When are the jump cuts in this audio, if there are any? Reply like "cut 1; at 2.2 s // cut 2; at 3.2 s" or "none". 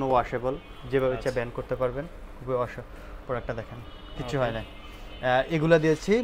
none